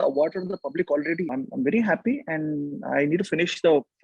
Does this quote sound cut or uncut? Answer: cut